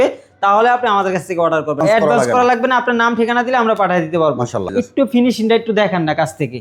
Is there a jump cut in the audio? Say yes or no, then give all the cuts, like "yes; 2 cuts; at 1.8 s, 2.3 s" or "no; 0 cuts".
yes; 2 cuts; at 1.8 s, 4.7 s